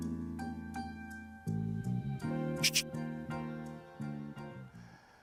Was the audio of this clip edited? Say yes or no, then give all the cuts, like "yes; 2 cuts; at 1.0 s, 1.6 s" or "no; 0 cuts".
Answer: no; 0 cuts